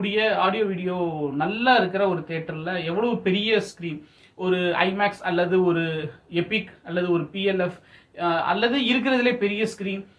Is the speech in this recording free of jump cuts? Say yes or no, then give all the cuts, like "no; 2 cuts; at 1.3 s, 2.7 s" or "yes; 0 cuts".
yes; 0 cuts